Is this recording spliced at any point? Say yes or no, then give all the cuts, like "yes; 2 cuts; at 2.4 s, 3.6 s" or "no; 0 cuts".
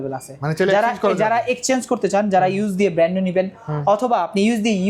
no; 0 cuts